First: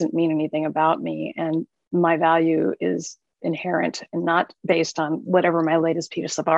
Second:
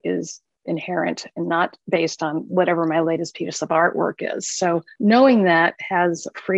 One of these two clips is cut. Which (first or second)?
second